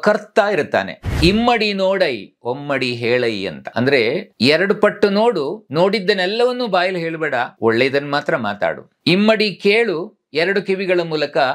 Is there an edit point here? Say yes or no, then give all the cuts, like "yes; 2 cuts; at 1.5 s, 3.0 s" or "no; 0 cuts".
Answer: yes; 5 cuts; at 1.1 s, 4.0 s, 5.6 s, 7.5 s, 8.9 s